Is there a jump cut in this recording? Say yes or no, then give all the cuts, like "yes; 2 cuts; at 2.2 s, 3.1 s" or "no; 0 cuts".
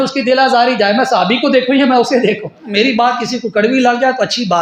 yes; 1 cut; at 2.7 s